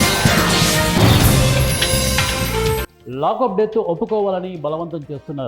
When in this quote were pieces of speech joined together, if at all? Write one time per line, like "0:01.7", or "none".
0:02.8